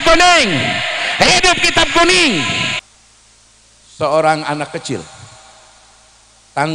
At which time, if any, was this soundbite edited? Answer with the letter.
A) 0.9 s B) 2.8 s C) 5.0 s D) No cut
B